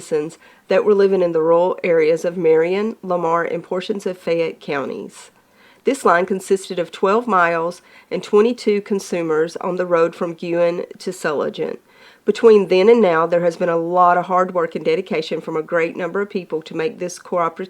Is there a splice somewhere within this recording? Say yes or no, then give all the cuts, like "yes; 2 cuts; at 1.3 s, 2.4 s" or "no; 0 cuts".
no; 0 cuts